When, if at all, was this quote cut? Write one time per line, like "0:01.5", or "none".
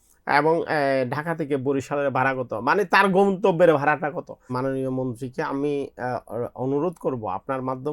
0:04.5